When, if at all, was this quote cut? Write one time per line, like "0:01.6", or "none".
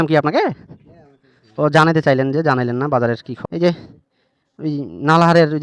0:03.3